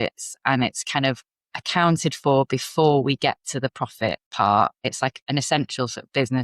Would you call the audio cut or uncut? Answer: cut